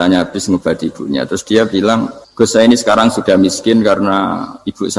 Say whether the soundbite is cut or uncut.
cut